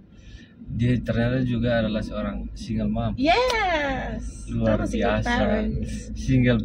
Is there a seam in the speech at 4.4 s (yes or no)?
no